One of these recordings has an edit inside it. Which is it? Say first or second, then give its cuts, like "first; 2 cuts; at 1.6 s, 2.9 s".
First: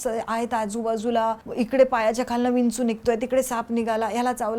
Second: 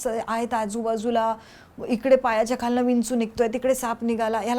first; 1 cut; at 1.4 s